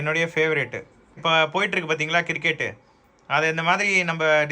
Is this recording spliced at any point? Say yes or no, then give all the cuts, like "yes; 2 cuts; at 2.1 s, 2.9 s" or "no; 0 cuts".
yes; 1 cut; at 1.2 s